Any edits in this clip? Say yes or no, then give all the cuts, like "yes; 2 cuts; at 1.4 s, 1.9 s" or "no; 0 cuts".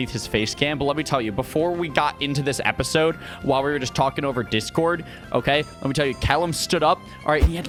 no; 0 cuts